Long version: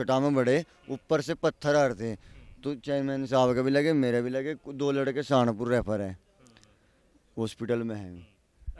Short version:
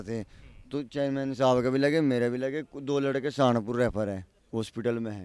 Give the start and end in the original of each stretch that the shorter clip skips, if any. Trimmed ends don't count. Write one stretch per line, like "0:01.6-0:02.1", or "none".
0:06.3-0:07.2